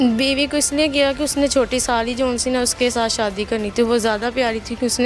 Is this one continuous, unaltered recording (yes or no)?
yes